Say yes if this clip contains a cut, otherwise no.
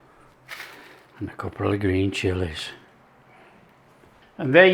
yes